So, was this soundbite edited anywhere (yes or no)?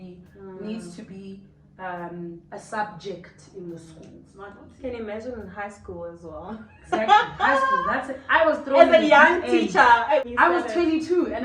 yes